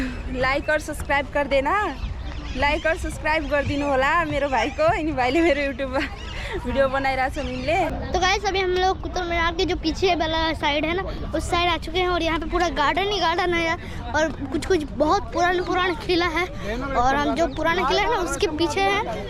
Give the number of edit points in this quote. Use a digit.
0